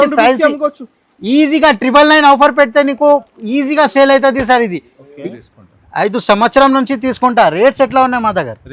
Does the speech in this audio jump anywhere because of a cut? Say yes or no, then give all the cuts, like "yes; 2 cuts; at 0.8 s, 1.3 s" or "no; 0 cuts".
yes; 1 cut; at 5.2 s